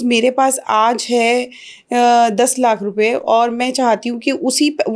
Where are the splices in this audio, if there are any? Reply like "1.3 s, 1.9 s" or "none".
none

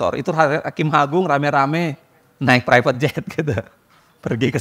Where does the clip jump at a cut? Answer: none

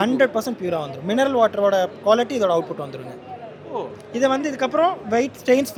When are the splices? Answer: none

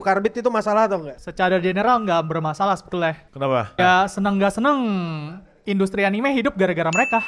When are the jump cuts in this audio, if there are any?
1.2 s, 3.8 s

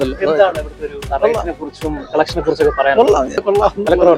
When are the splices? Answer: none

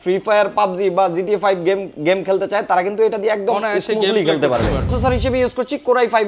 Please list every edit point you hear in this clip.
4.9 s

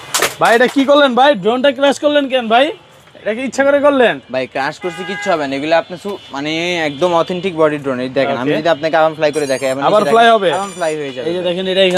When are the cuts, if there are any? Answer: none

